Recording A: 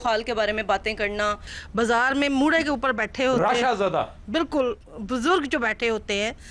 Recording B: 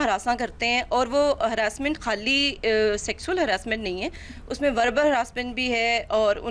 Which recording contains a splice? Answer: A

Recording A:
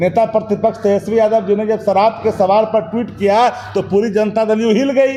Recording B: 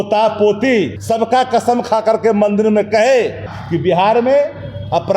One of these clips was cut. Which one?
B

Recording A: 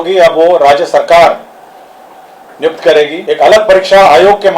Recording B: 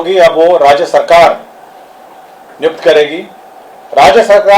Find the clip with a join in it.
A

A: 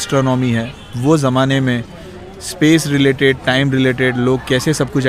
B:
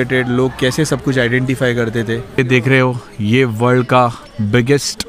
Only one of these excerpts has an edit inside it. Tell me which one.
B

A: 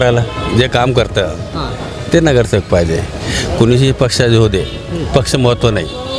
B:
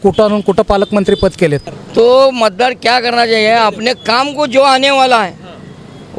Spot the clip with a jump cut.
B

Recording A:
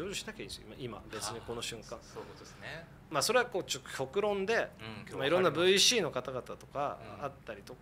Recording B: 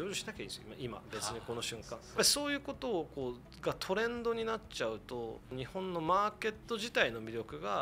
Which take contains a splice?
B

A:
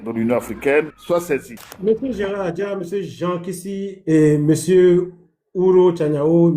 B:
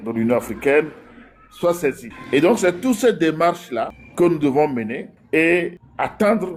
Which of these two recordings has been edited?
A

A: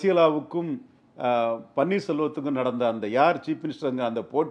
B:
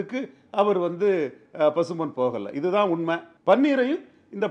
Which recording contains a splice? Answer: B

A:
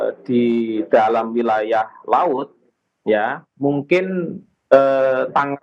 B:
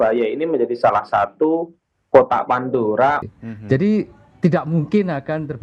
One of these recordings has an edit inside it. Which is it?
B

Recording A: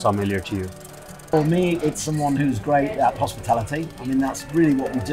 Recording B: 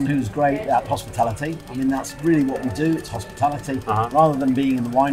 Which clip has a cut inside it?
A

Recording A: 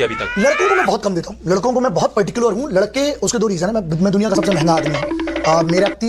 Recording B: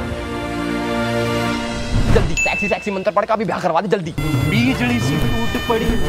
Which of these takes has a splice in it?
B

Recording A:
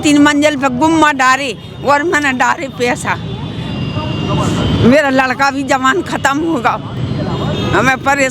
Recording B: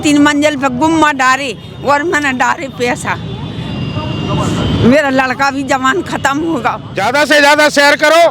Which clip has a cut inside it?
B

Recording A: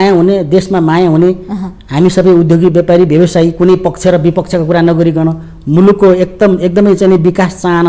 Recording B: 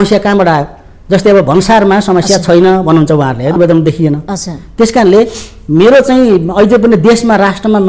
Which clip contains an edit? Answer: B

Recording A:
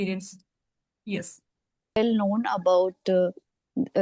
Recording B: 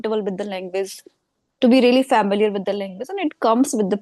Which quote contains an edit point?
A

